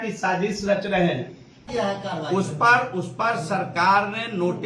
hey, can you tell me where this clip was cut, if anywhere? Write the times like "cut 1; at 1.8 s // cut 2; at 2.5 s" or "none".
cut 1; at 1.6 s